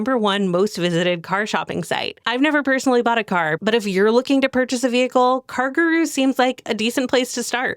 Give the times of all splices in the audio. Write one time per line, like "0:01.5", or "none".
0:03.6